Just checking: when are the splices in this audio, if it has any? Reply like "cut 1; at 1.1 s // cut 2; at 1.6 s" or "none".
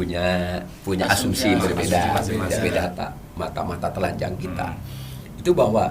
cut 1; at 2.8 s